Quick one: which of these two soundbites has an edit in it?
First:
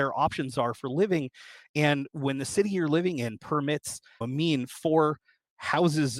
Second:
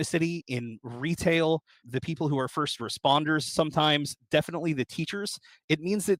first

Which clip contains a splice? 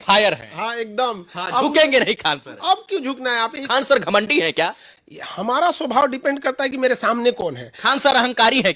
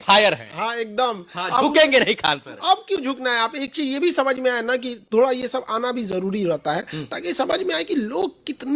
first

